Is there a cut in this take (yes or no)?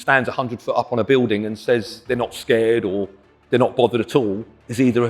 yes